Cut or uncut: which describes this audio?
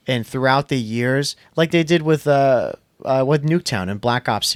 uncut